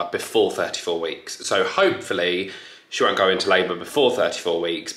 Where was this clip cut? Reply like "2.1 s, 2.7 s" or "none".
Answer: none